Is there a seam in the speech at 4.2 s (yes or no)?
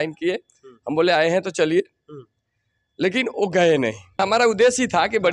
yes